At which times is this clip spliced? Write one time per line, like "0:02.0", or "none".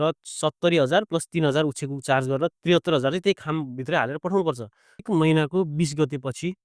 0:05.1